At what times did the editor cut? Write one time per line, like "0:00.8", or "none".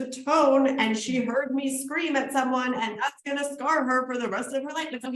none